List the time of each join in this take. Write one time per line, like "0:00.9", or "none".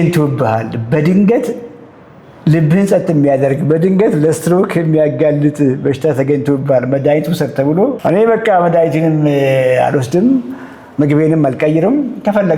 0:08.0